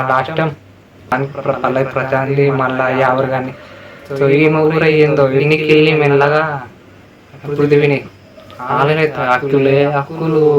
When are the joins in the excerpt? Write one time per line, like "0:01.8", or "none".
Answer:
0:01.1